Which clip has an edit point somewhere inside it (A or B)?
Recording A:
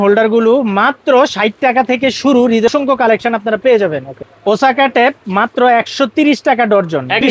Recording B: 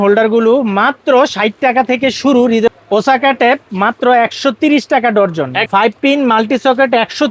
B